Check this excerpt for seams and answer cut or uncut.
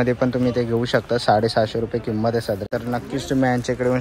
cut